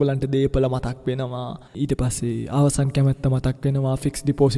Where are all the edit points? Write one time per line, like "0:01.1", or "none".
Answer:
0:01.6